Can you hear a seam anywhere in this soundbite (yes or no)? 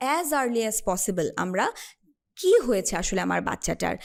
no